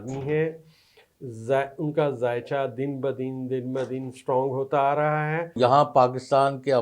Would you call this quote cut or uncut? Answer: cut